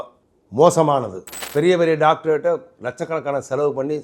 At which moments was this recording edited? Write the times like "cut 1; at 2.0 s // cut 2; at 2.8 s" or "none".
cut 1; at 1.4 s